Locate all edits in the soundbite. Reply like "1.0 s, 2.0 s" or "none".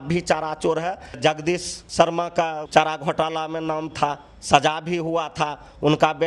1.2 s, 2.6 s